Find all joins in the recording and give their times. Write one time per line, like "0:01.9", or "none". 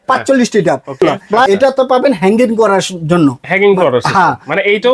0:01.2